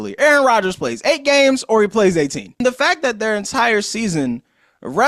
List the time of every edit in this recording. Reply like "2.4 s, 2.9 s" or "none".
2.6 s